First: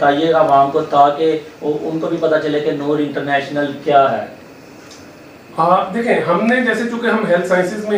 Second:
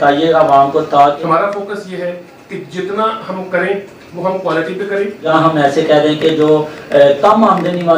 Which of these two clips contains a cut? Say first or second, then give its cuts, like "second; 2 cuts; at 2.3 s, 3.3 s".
second; 2 cuts; at 1.2 s, 5.3 s